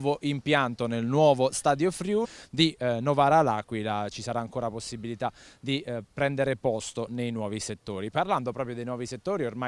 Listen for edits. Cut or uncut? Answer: uncut